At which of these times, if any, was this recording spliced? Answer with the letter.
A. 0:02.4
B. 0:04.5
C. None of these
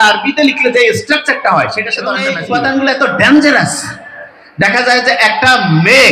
A